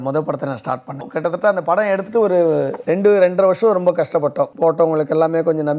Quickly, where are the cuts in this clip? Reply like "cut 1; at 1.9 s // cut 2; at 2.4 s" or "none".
cut 1; at 1.1 s // cut 2; at 2.8 s // cut 3; at 4.5 s